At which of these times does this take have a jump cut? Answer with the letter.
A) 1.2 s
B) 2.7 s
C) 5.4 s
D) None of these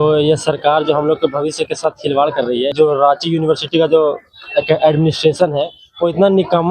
B